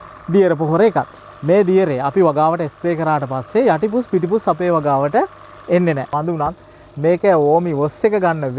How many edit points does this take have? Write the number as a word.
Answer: two